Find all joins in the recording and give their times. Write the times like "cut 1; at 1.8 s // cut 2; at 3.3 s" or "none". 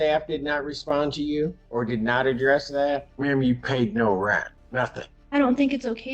cut 1; at 1.6 s // cut 2; at 3.1 s // cut 3; at 4.9 s